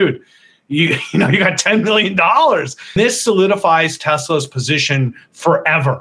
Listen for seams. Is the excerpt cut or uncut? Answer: cut